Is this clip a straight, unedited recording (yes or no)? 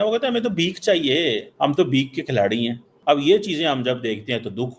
no